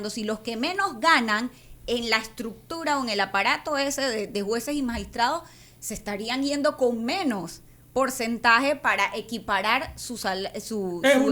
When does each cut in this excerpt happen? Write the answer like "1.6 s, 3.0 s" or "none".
none